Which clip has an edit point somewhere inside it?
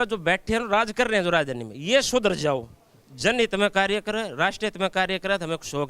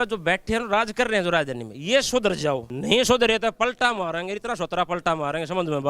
second; 1 cut; at 2.7 s

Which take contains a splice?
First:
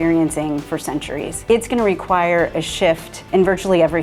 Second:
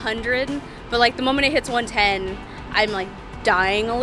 first; 2 cuts; at 1.4 s, 3.3 s

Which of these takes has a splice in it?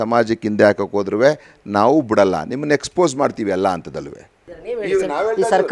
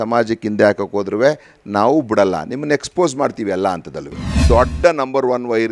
second; 1 cut; at 4.4 s

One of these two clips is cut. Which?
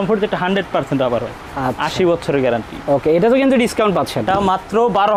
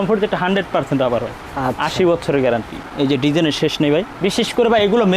second; 1 cut; at 2.8 s

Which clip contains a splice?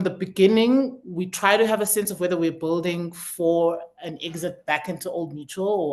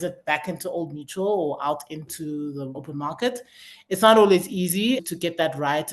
second; 2 cuts; at 2.8 s, 5.0 s

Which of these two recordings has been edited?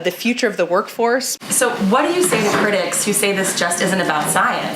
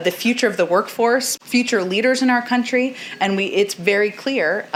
first; 1 cut; at 1.4 s

